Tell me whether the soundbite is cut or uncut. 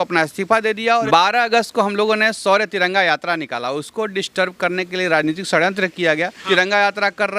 cut